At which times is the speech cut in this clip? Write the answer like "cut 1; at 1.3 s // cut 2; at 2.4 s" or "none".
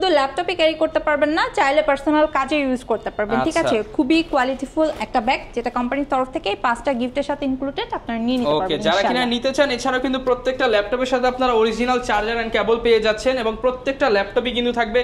none